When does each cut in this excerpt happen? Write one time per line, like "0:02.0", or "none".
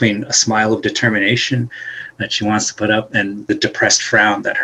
0:03.5